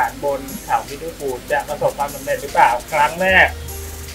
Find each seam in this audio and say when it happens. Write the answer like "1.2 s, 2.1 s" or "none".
none